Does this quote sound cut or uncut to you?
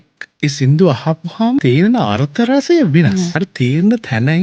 cut